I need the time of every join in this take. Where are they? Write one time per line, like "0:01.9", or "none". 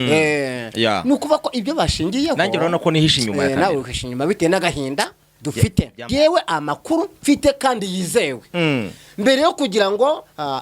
0:06.1